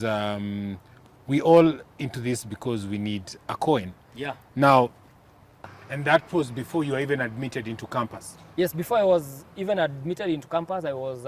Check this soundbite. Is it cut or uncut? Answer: cut